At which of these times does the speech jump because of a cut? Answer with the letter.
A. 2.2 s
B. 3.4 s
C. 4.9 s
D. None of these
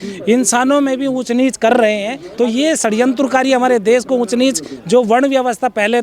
A